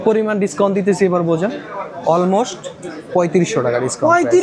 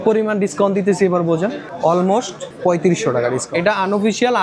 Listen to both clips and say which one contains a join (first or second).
second